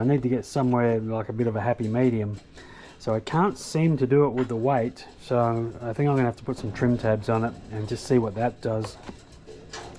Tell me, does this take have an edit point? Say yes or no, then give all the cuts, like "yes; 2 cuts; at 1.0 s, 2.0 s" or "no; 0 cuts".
no; 0 cuts